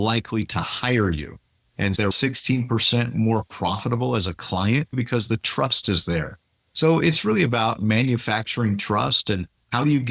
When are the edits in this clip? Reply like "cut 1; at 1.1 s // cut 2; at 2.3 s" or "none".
cut 1; at 2.1 s // cut 2; at 4.9 s